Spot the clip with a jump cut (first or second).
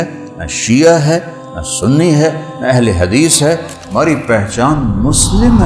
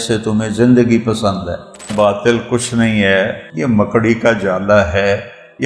second